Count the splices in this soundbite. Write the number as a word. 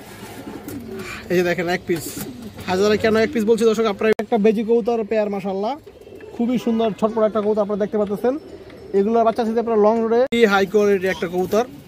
two